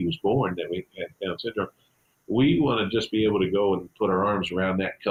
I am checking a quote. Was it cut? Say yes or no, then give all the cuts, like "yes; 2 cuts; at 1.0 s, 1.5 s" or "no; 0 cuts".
no; 0 cuts